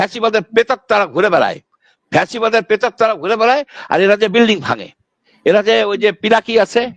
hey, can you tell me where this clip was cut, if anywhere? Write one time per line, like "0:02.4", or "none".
none